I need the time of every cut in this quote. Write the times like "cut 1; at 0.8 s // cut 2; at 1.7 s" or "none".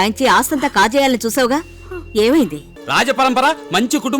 cut 1; at 2.7 s